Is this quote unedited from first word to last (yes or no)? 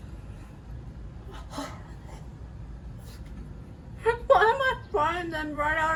yes